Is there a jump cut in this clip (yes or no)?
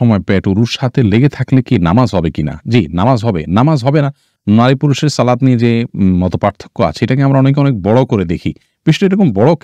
no